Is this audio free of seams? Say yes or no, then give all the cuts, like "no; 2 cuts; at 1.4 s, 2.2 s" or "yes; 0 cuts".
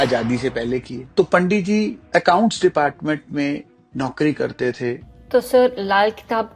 no; 3 cuts; at 1.0 s, 2.0 s, 5.1 s